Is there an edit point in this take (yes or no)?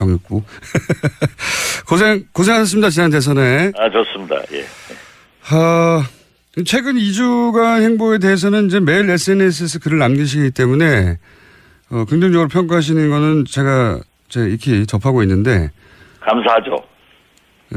no